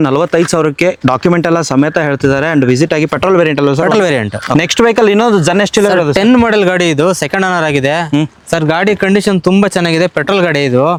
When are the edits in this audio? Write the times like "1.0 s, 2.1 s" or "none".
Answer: none